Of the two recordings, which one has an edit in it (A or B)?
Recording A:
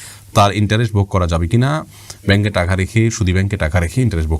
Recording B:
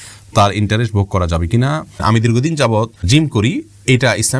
B